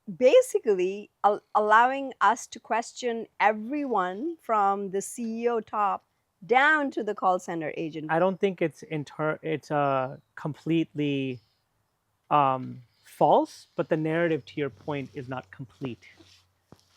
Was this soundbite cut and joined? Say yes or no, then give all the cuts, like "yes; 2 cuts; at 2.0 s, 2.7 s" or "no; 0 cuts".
yes; 1 cut; at 8.1 s